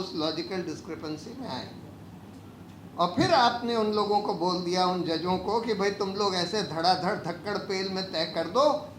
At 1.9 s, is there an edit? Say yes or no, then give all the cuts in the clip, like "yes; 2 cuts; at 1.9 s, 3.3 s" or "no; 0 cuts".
no; 0 cuts